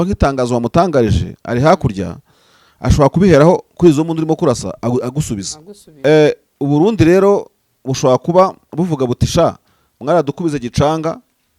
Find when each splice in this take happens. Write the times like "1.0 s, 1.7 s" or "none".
5.8 s